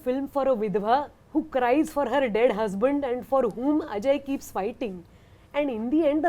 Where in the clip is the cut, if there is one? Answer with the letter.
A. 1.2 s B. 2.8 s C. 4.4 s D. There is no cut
A